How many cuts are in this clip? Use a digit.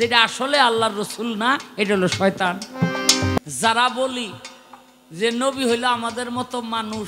1